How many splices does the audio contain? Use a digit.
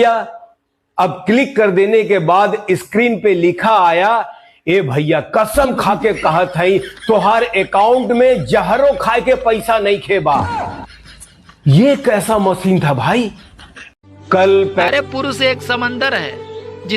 1